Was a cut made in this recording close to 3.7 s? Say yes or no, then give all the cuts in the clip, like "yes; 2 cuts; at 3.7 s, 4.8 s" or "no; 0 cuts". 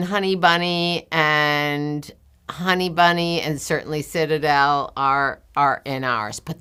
no; 0 cuts